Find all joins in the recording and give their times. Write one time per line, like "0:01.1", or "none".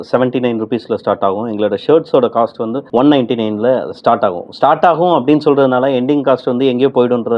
none